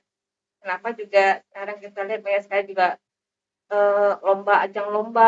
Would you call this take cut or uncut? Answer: uncut